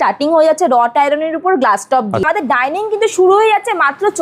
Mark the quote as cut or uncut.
cut